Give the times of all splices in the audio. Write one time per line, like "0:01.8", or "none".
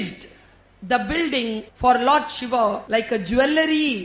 0:01.7
0:02.8